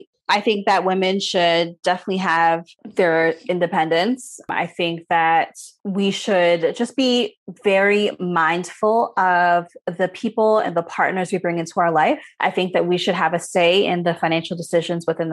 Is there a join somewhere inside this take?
yes; 2 cuts; at 2.8 s, 12.3 s

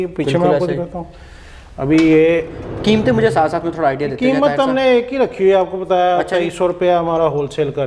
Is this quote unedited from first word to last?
yes; 0 cuts

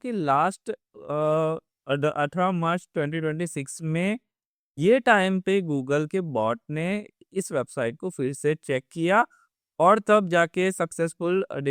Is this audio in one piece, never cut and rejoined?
yes; 0 cuts

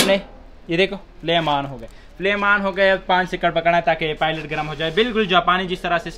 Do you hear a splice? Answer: no; 0 cuts

